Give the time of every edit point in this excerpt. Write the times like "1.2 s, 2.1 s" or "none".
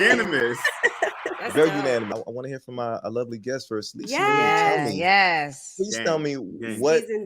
2.1 s